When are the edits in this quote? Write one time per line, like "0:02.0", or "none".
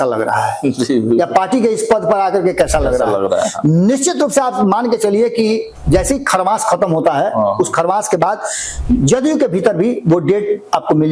none